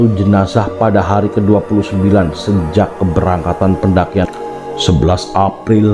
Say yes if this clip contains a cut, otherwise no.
yes